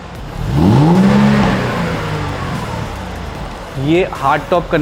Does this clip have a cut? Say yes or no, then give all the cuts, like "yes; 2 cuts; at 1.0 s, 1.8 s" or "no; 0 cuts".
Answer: yes; 1 cut; at 3.6 s